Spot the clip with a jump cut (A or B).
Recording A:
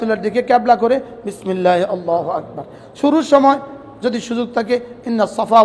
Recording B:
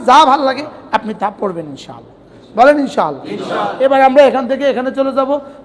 B